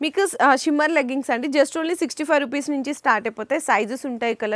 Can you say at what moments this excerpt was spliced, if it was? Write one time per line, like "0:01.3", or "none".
none